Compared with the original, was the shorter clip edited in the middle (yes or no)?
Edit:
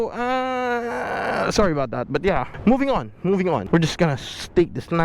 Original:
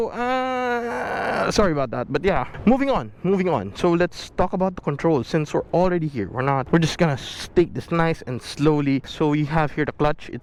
yes